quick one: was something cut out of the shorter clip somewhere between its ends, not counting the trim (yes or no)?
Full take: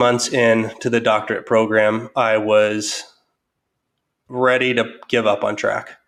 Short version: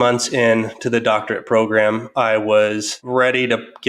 yes